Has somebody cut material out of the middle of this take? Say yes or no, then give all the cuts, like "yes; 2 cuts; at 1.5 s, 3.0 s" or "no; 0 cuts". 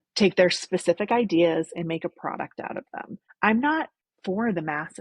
yes; 2 cuts; at 3.2 s, 4.0 s